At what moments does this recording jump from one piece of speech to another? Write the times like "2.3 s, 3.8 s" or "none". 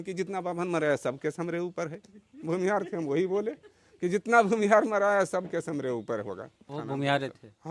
6.7 s